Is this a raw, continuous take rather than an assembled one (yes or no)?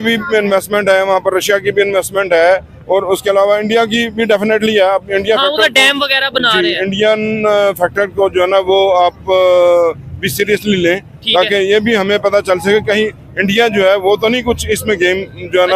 yes